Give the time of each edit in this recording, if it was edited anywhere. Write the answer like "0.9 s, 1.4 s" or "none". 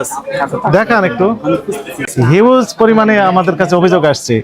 2.1 s